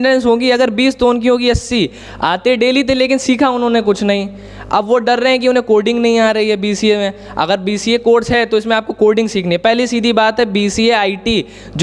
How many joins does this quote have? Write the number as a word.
zero